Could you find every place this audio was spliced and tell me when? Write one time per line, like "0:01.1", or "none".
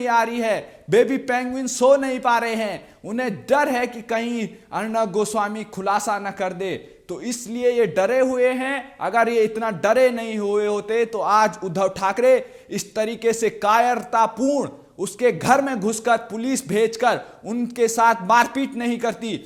none

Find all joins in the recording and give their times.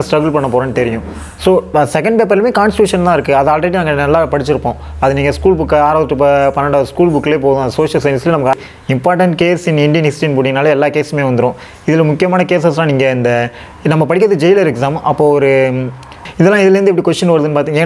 0:08.6
0:16.2

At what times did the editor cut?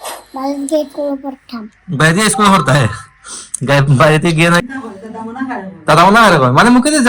0:04.6

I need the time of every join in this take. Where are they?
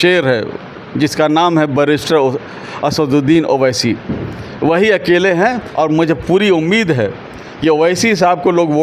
0:05.6

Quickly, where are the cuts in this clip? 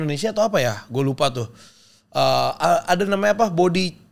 none

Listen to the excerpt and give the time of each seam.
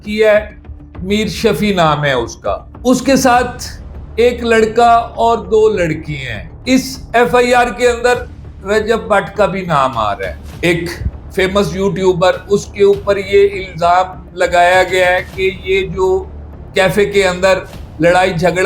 0:02.7
0:06.6
0:10.5

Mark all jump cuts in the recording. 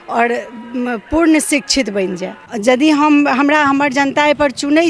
0:02.4

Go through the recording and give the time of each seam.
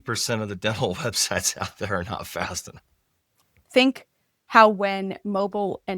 0:03.5

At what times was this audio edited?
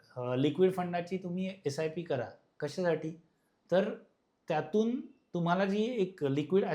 none

